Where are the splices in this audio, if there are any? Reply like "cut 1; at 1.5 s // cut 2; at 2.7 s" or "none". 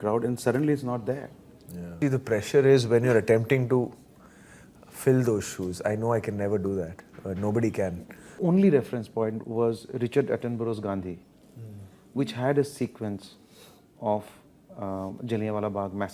cut 1; at 1.8 s // cut 2; at 8.0 s